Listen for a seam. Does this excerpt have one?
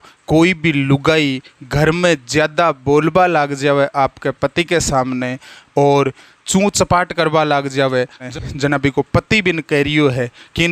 yes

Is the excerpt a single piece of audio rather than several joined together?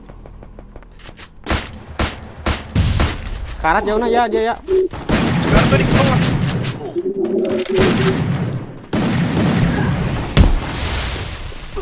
yes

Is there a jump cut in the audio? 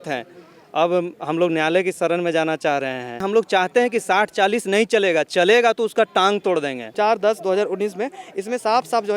yes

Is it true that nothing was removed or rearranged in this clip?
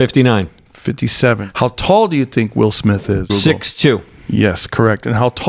no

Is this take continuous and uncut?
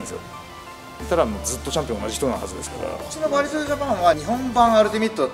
no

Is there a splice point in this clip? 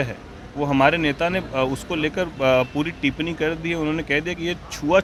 no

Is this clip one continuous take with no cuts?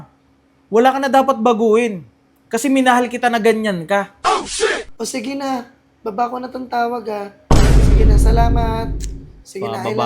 no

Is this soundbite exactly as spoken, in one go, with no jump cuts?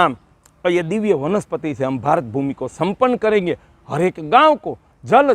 yes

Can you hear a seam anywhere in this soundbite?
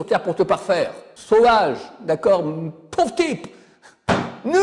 yes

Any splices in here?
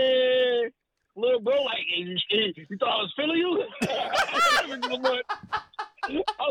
no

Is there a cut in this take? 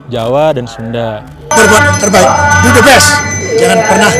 yes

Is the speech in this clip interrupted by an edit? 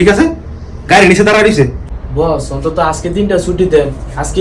yes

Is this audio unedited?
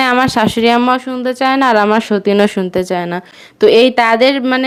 yes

